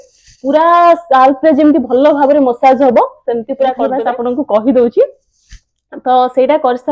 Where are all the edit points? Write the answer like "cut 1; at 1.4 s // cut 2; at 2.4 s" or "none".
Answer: cut 1; at 3.9 s